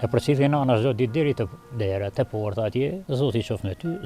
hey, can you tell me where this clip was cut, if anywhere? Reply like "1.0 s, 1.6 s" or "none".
3.0 s